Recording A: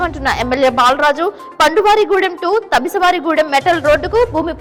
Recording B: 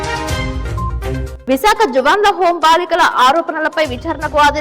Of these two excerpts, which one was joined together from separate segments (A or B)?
B